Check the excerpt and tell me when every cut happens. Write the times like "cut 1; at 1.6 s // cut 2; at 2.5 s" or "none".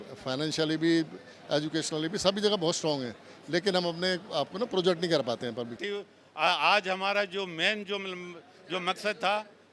cut 1; at 5.7 s